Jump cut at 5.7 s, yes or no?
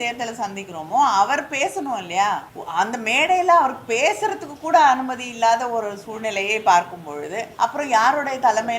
no